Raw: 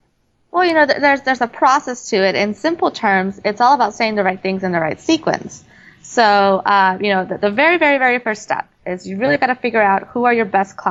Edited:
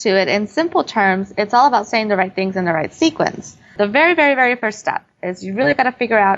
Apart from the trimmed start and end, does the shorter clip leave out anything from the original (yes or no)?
yes